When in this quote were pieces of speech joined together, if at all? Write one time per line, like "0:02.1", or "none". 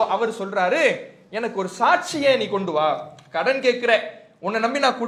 none